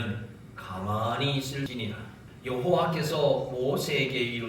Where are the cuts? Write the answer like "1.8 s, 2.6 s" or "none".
1.7 s